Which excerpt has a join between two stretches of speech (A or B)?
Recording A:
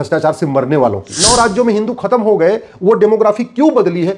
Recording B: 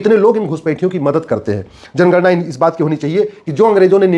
A